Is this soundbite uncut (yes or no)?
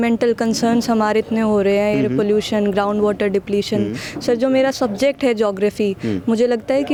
yes